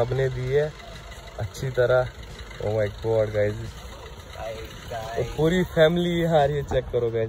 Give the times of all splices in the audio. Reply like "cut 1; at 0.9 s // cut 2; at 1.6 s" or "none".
none